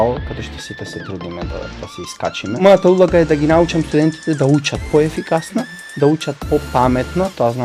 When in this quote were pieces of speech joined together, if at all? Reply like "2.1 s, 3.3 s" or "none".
2.6 s